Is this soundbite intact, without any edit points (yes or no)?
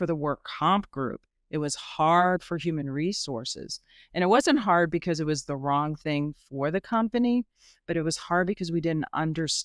yes